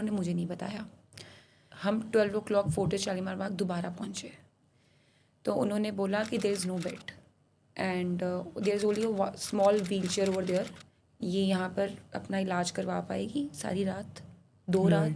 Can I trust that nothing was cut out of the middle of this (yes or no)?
no